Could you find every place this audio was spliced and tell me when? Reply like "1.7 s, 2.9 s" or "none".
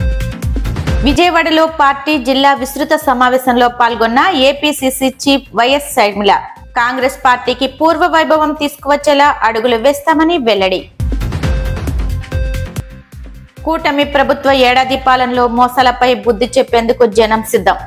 none